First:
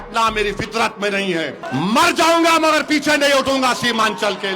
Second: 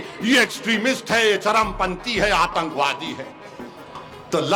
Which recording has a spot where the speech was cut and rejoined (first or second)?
first